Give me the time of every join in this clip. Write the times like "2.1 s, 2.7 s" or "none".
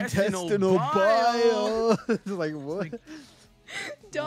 none